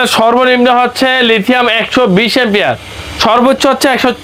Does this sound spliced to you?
no; 0 cuts

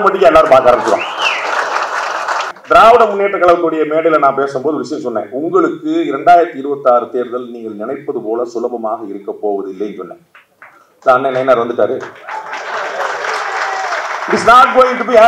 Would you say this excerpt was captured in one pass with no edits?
no; 1 cut; at 2.5 s

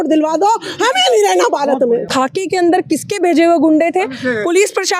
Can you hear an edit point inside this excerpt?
yes; 1 cut; at 2.1 s

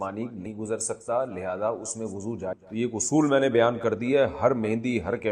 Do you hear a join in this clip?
yes; 1 cut; at 2.5 s

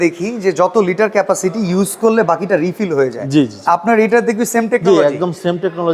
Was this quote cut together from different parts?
no; 0 cuts

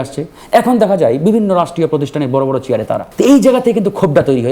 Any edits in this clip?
yes; 1 cut; at 3.1 s

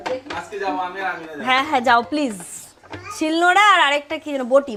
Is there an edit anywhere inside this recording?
no; 0 cuts

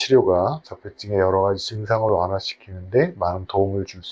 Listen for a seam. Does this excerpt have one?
no; 0 cuts

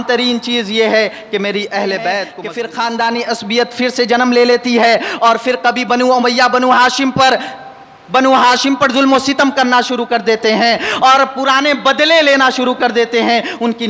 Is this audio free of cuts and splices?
no; 1 cut; at 2.4 s

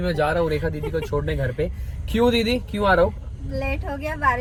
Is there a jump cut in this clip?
no; 0 cuts

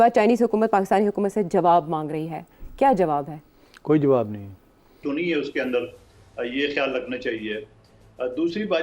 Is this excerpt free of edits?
no; 1 cut; at 5.0 s

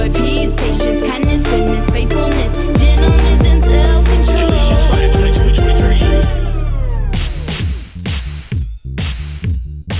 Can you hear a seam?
yes; 1 cut; at 7.1 s

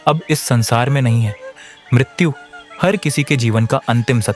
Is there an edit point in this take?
no; 0 cuts

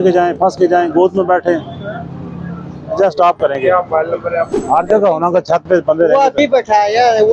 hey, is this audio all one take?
yes; 0 cuts

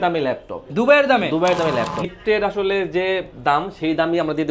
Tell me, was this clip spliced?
yes; 1 cut; at 2.0 s

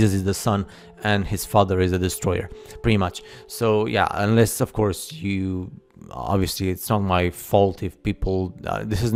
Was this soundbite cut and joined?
no; 0 cuts

